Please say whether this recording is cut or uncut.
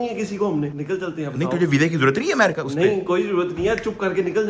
uncut